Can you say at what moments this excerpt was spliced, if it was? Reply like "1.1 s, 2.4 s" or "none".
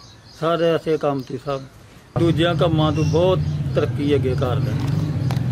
2.2 s